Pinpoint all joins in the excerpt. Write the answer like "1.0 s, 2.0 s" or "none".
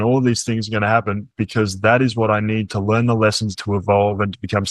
3.5 s